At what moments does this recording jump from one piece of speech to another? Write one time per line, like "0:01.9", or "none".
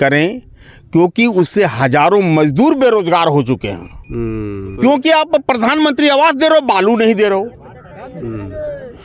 0:04.7